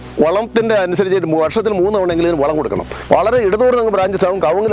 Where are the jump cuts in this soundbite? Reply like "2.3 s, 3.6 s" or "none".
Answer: 2.9 s